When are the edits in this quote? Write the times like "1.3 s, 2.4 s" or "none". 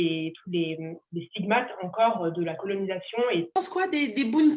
3.6 s